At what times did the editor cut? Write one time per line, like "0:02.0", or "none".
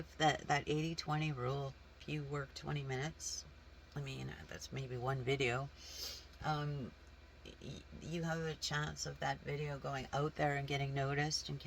0:02.0